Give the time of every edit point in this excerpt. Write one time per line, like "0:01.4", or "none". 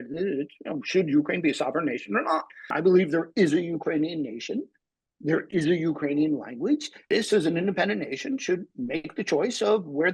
0:02.6
0:06.9